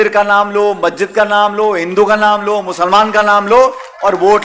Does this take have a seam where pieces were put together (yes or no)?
no